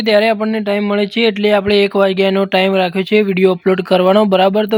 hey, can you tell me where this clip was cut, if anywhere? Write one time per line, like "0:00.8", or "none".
none